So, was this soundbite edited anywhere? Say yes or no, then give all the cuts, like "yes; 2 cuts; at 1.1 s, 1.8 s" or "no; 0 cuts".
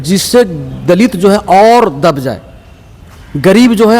no; 0 cuts